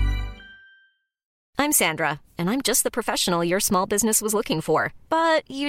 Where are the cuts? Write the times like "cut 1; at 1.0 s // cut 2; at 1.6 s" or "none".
cut 1; at 1.4 s